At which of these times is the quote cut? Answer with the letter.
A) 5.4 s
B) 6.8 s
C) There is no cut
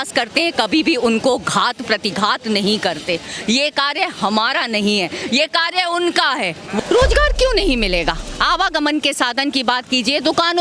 B